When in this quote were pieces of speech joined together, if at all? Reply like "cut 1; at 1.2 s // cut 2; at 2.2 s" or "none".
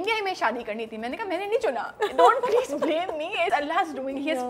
cut 1; at 3.5 s